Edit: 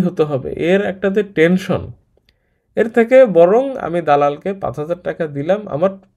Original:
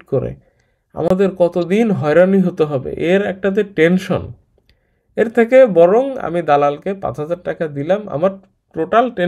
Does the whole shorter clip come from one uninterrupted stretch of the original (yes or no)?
yes